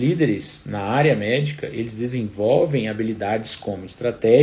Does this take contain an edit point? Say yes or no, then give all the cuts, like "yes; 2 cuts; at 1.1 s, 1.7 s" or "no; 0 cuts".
no; 0 cuts